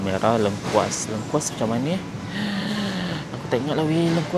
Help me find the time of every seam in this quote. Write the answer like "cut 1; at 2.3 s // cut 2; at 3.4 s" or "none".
none